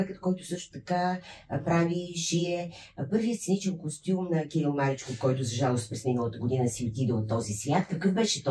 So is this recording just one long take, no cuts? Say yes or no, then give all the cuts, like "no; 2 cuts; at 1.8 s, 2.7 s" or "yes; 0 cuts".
yes; 0 cuts